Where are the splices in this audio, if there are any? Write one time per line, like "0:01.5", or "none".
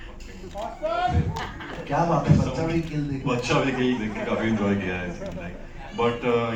none